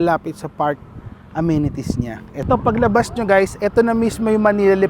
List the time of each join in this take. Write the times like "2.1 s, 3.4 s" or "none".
2.3 s